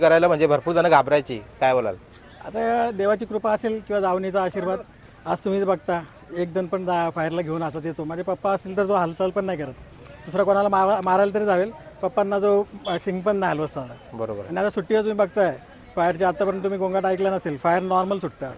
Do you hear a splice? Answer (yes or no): no